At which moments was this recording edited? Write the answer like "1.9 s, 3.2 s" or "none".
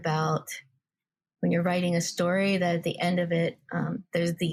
none